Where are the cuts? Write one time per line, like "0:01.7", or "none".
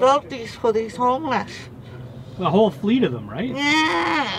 none